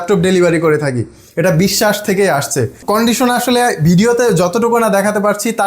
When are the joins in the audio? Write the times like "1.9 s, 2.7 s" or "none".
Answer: 2.8 s